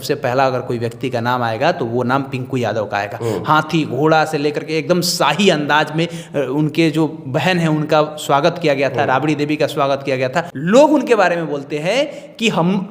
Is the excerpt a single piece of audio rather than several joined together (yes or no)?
no